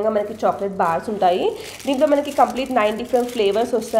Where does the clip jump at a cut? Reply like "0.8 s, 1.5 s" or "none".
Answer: none